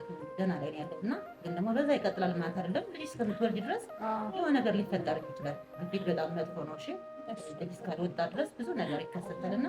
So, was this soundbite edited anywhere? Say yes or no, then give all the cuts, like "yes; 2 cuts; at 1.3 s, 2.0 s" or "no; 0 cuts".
no; 0 cuts